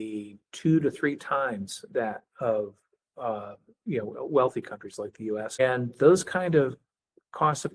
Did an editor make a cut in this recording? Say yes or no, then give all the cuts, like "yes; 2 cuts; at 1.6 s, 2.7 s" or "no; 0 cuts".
yes; 1 cut; at 5.6 s